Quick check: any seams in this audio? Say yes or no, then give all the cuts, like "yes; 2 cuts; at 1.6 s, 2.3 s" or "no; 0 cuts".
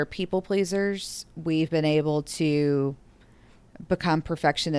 no; 0 cuts